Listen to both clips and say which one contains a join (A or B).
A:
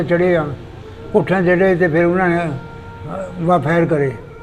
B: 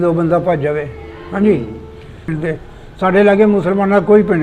B